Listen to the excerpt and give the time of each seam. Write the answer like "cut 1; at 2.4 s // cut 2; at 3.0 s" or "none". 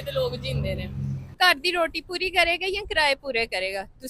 cut 1; at 1.4 s